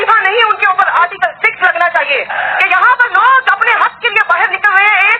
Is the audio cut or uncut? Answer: cut